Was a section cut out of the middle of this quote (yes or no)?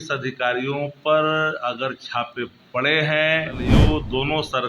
yes